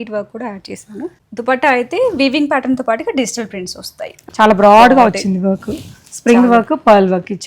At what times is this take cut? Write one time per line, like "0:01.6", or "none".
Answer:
0:01.2
0:04.2

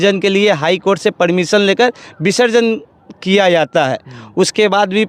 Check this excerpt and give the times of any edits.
none

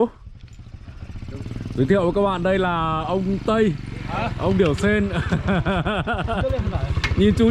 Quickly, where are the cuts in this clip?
none

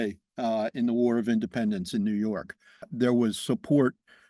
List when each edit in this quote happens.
0:02.9

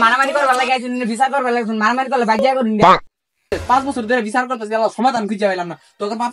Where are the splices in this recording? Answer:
0:03.5

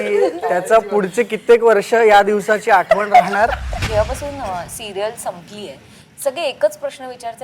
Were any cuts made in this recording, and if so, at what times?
0:03.7

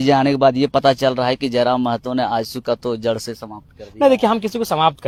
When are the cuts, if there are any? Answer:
none

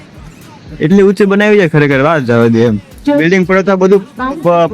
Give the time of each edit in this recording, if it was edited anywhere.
0:02.9

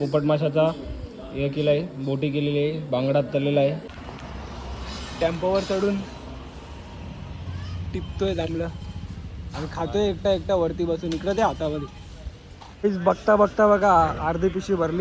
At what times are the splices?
0:03.9
0:12.7

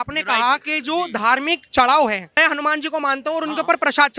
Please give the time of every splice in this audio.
0:02.3

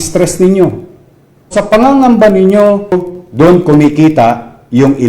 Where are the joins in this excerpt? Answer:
0:01.5
0:03.1

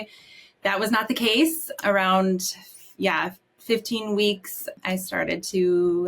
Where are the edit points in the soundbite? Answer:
0:01.7
0:04.8

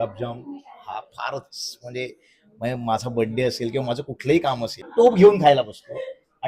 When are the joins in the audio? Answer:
0:04.9

